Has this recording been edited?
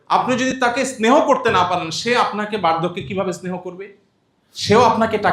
no; 0 cuts

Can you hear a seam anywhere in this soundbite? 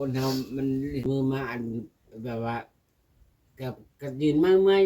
yes; 1 cut; at 1.1 s

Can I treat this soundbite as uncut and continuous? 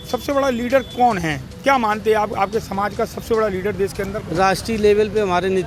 yes; 0 cuts

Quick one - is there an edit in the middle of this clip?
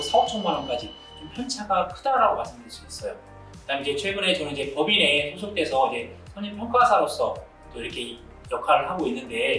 no; 0 cuts

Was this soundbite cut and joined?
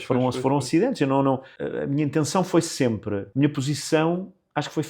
yes; 2 cuts; at 1.6 s, 3.3 s

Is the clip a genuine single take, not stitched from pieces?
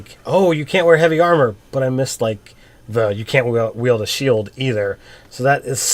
yes; 0 cuts

